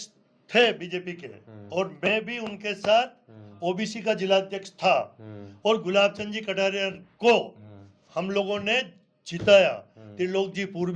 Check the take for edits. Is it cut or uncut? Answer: uncut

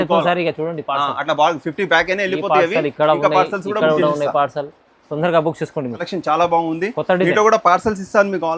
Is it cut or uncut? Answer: cut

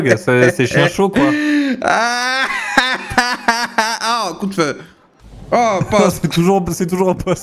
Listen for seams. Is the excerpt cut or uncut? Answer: uncut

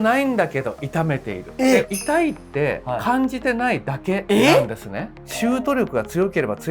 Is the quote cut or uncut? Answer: cut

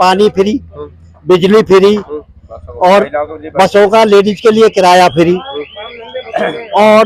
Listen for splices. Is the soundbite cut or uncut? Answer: uncut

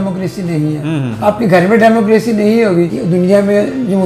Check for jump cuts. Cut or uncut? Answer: cut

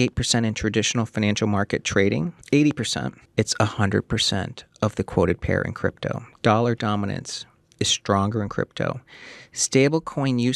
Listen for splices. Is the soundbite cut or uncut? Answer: cut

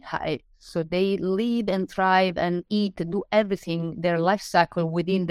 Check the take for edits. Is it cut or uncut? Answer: uncut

